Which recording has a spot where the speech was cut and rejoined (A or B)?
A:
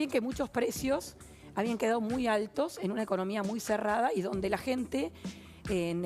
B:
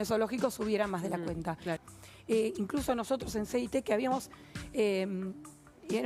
B